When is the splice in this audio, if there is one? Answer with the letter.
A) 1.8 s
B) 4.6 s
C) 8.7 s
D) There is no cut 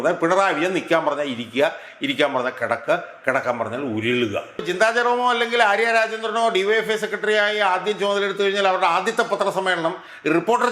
B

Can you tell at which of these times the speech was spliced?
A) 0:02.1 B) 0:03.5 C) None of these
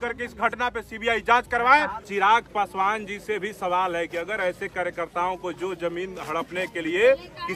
A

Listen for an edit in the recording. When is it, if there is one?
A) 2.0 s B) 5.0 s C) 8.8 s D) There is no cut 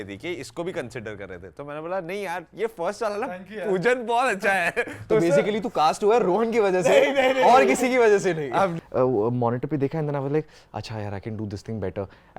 C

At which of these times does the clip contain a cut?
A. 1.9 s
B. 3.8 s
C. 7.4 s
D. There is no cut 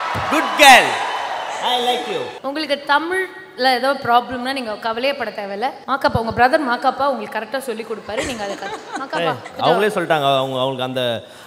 D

